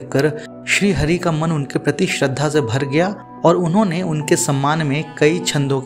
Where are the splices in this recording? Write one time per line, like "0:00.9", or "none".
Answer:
none